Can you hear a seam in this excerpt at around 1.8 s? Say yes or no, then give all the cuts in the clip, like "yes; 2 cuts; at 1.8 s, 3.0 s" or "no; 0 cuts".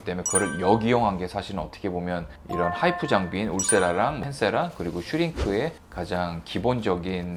no; 0 cuts